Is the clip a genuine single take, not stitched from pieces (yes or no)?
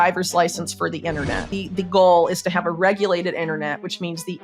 no